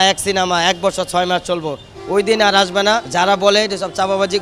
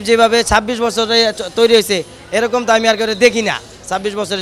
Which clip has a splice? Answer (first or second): first